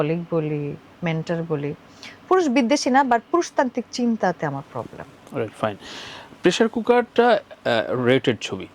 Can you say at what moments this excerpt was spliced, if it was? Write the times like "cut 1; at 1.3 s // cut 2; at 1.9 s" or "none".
none